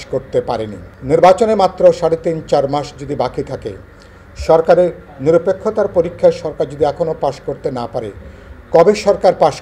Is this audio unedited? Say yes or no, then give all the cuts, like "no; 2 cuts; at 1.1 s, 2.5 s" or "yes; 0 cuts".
no; 1 cut; at 0.9 s